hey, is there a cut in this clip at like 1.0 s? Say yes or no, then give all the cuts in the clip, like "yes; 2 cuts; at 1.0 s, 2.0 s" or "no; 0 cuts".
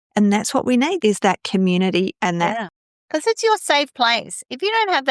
yes; 1 cut; at 1.0 s